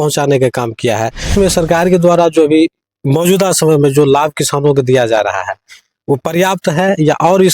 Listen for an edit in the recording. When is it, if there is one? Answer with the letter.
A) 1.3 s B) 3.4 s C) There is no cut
A